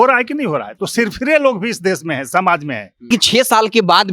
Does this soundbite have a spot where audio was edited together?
yes; 1 cut; at 3.1 s

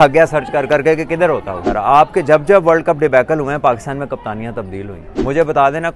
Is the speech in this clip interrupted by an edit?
yes; 2 cuts; at 1.6 s, 5.0 s

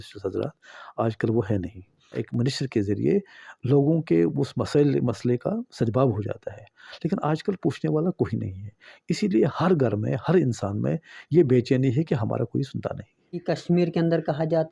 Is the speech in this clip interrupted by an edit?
yes; 2 cuts; at 2.2 s, 13.4 s

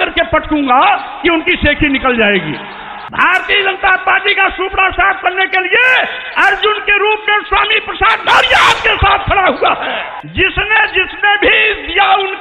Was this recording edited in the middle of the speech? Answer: yes; 1 cut; at 10.1 s

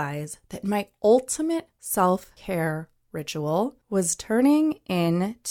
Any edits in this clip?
yes; 3 cuts; at 1.8 s, 2.3 s, 3.8 s

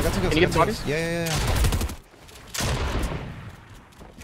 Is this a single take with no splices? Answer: no; 1 cut; at 2.0 s

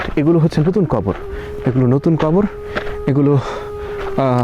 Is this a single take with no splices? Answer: yes; 0 cuts

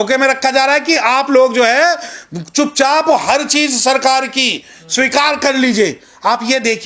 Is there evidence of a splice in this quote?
no; 0 cuts

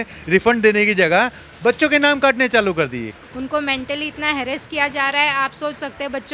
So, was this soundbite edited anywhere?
yes; 1 cut; at 3.2 s

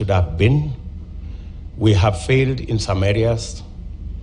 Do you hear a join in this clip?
no; 0 cuts

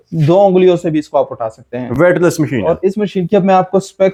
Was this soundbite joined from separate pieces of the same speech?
no; 0 cuts

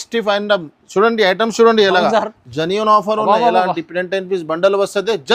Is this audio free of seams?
yes; 0 cuts

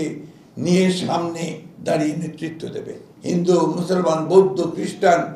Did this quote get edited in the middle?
yes; 1 cut; at 3.1 s

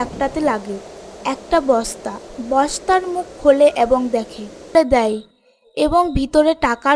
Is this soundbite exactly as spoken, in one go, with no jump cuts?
no; 1 cut; at 4.7 s

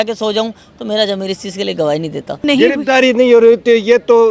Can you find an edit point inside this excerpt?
yes; 1 cut; at 2.4 s

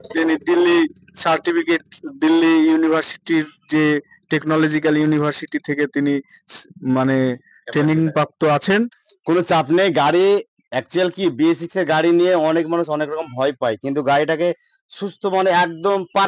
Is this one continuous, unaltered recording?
no; 1 cut; at 9.1 s

